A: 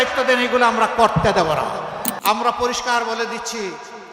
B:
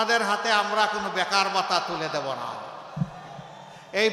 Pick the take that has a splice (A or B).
A